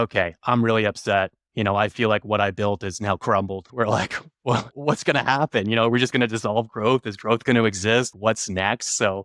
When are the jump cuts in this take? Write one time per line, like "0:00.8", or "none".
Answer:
0:03.7